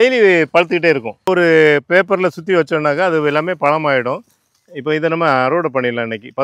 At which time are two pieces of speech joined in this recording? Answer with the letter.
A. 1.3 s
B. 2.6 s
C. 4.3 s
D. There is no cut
A